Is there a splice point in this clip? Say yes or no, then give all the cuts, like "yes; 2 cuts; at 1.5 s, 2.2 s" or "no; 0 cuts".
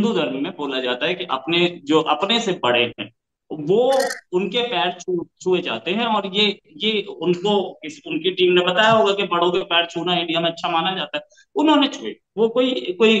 no; 0 cuts